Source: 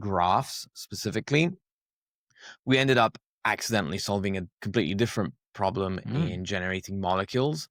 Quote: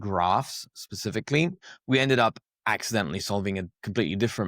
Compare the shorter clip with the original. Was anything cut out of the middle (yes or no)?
yes